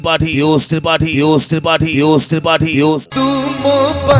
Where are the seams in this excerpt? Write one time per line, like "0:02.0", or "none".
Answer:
0:03.0